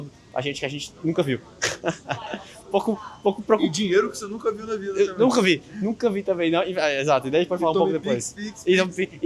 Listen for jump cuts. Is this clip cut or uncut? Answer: uncut